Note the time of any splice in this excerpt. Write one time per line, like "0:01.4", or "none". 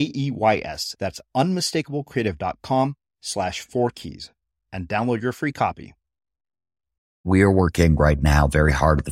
0:07.2